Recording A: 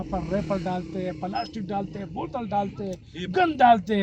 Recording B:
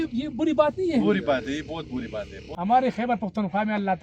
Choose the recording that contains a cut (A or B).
B